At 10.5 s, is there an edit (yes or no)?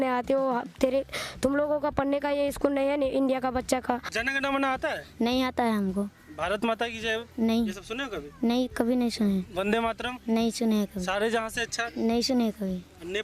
no